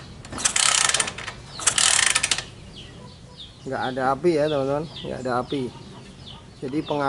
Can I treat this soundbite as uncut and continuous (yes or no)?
yes